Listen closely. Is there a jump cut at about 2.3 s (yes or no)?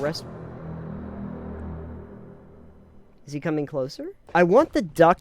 no